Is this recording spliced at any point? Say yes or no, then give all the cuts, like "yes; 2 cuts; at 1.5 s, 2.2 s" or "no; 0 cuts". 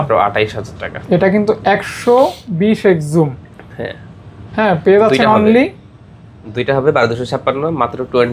no; 0 cuts